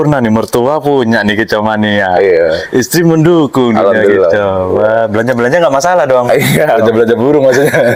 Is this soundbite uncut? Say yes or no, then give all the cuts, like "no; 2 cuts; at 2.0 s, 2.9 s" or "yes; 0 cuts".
yes; 0 cuts